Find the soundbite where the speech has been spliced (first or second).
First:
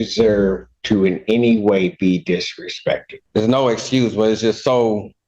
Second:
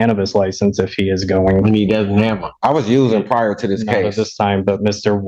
first